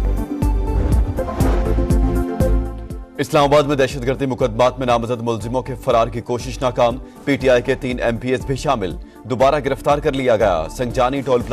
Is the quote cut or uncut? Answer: cut